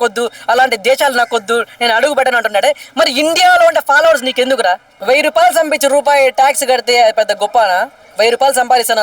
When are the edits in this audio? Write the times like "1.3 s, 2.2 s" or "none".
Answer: 4.9 s